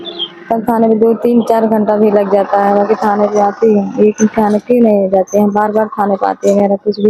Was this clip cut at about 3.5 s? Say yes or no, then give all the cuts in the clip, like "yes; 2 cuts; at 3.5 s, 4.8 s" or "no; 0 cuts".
no; 0 cuts